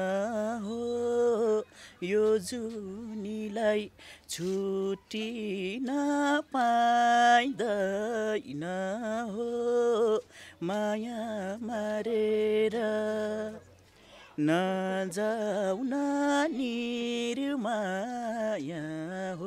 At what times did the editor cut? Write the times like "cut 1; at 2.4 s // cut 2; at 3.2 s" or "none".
none

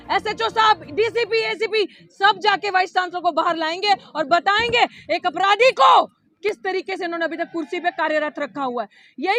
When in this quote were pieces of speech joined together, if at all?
none

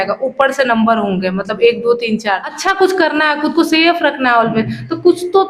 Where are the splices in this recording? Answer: cut 1; at 2.5 s

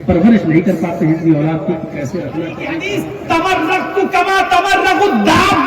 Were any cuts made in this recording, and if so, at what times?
cut 1; at 3.1 s

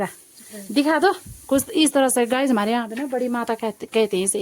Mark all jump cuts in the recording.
none

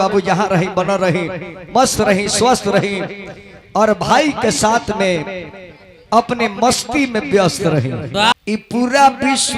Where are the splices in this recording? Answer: cut 1; at 8.3 s

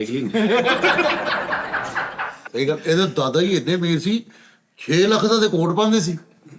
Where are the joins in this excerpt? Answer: cut 1; at 2.4 s

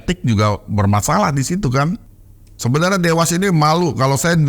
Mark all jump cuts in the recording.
cut 1; at 2.1 s

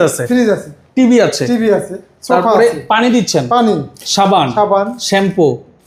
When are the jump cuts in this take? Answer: none

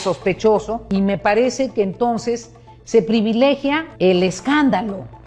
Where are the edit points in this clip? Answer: cut 1; at 0.8 s // cut 2; at 3.9 s

